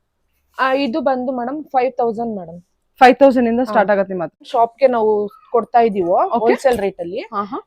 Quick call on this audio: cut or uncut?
cut